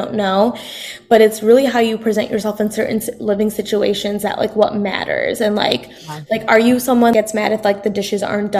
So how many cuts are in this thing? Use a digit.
1